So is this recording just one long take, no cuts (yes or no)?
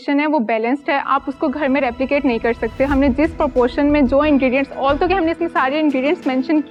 yes